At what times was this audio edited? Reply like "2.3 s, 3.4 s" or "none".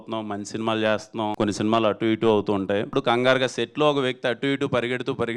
1.3 s, 2.9 s